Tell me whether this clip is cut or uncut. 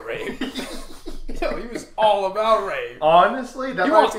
uncut